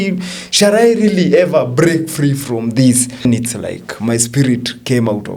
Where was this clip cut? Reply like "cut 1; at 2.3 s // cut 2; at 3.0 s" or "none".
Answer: cut 1; at 3.2 s